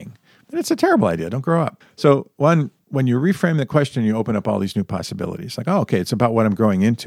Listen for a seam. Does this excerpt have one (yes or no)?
yes